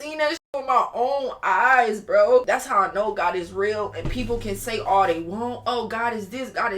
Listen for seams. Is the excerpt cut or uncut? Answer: cut